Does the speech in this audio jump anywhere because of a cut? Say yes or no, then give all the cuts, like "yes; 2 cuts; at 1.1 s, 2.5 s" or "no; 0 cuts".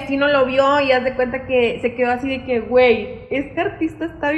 no; 0 cuts